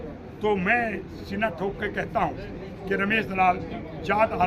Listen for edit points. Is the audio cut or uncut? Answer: uncut